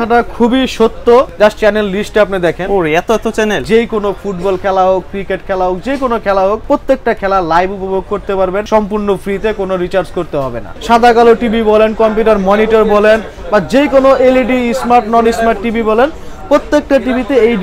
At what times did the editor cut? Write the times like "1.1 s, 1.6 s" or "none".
1.3 s, 3.6 s, 6.6 s, 8.7 s, 10.7 s